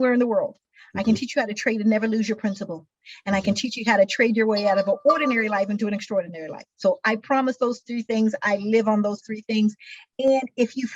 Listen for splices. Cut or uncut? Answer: uncut